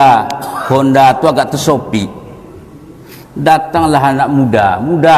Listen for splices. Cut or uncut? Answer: uncut